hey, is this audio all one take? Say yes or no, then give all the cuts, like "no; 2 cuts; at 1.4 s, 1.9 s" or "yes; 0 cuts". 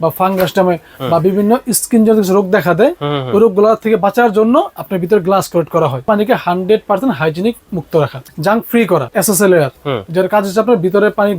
no; 3 cuts; at 6.1 s, 8.2 s, 9.1 s